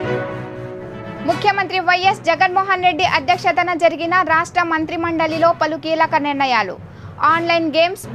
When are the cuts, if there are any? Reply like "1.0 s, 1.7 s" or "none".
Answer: 1.0 s